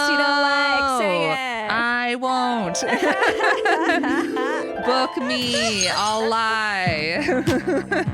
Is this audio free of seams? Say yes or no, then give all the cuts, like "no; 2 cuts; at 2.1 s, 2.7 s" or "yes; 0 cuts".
yes; 0 cuts